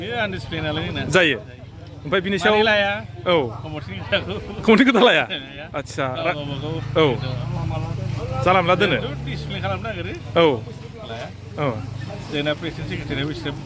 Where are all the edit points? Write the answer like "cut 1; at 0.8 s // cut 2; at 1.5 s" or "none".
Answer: none